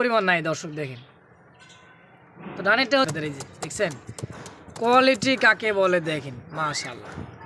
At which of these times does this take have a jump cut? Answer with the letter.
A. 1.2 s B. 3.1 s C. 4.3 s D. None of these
B